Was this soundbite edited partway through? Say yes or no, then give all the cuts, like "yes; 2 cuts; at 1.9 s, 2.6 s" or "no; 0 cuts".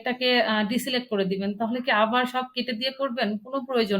no; 0 cuts